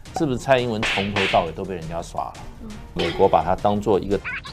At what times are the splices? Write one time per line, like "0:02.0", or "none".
0:03.0